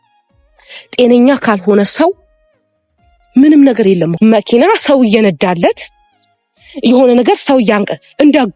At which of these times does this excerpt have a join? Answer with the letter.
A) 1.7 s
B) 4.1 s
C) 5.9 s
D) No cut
B